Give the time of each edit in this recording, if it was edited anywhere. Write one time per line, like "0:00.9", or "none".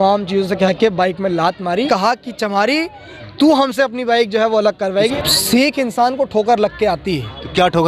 0:01.9
0:05.1